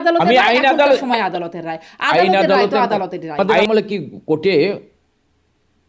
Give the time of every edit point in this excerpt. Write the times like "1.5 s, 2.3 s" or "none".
3.5 s